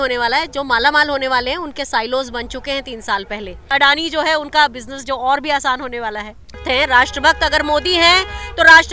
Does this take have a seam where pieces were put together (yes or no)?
yes